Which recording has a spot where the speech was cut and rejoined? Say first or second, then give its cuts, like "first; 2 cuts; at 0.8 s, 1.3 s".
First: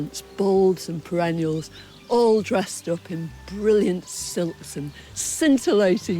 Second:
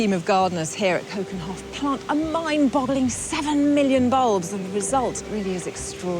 second; 1 cut; at 5.2 s